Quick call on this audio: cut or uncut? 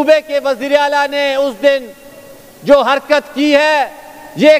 uncut